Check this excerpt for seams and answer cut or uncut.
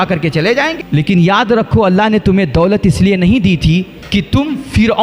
cut